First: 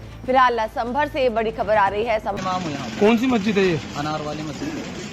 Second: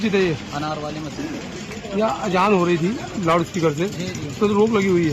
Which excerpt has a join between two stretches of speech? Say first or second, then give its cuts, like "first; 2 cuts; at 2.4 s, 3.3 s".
first; 1 cut; at 2.4 s